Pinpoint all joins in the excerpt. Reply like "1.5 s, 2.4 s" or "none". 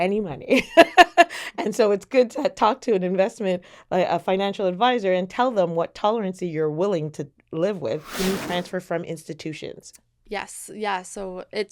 8.1 s